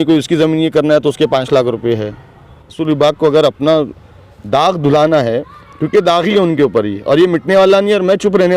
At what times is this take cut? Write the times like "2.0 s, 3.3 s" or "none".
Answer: 2.7 s